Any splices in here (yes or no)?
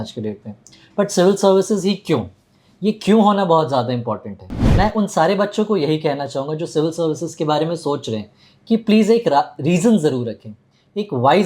yes